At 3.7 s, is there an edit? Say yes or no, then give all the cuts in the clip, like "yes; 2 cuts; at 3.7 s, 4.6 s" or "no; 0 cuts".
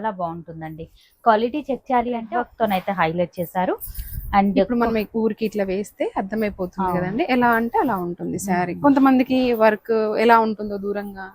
no; 1 cut; at 2.4 s